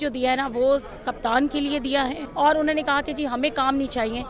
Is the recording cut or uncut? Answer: cut